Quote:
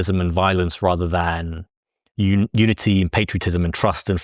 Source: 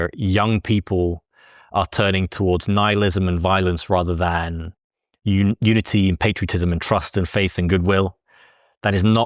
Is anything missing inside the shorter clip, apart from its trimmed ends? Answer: no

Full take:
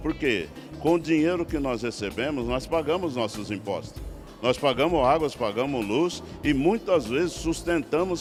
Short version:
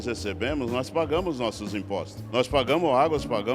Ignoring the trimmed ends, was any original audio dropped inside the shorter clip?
yes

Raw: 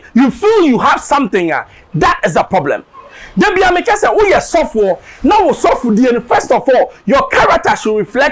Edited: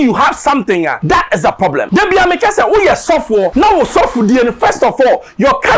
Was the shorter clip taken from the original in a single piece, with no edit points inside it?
no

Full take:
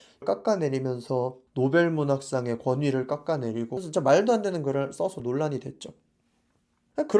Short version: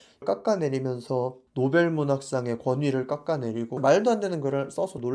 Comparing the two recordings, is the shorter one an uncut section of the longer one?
no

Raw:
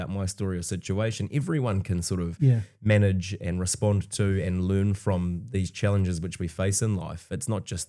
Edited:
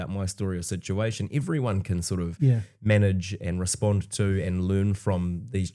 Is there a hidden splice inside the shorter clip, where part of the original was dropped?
no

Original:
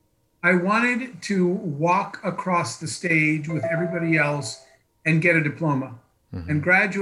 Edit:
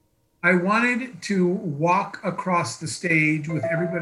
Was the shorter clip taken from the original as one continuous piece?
yes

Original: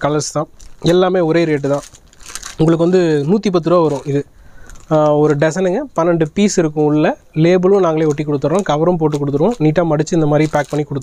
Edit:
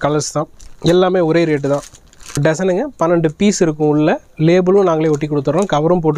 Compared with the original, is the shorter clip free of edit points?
no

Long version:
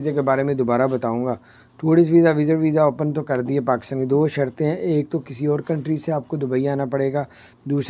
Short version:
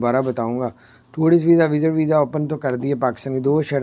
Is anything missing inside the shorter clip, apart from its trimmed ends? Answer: no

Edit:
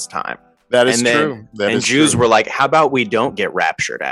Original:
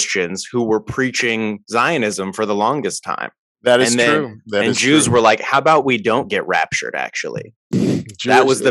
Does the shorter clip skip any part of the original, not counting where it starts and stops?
no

